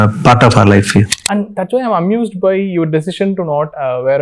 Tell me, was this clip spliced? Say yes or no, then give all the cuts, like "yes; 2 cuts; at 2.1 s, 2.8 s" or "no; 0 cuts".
yes; 1 cut; at 1.2 s